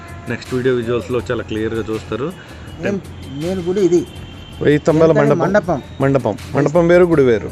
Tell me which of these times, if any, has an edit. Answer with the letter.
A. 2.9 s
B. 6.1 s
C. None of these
A